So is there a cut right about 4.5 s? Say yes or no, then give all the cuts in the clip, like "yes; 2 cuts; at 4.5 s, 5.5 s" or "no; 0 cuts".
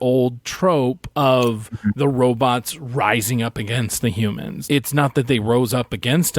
yes; 1 cut; at 4.5 s